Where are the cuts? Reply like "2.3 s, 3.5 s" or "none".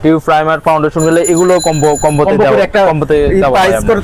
none